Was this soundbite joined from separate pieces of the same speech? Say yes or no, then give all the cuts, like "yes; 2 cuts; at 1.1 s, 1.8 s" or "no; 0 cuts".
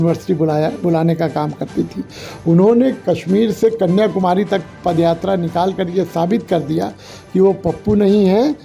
no; 0 cuts